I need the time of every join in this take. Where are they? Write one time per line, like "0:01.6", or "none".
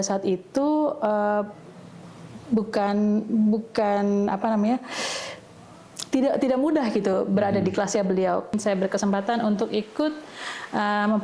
0:08.5